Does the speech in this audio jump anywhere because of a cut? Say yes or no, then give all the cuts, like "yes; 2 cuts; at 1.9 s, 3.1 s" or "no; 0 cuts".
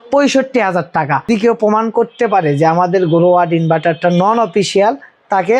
yes; 1 cut; at 1.3 s